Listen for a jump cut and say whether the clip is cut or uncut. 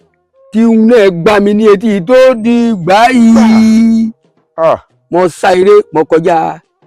uncut